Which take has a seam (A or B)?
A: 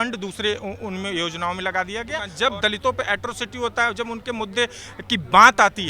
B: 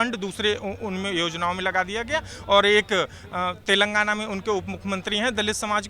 A